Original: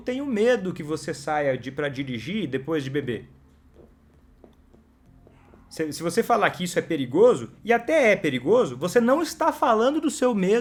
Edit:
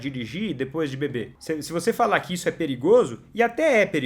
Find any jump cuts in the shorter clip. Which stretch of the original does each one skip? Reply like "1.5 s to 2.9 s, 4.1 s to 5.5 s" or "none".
3.3 s to 5.7 s